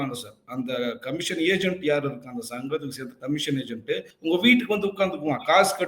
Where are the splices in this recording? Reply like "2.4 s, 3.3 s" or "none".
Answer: 4.1 s